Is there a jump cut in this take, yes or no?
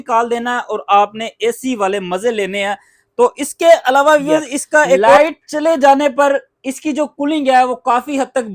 yes